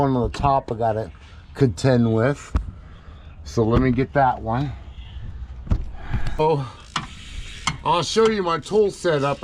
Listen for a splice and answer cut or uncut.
cut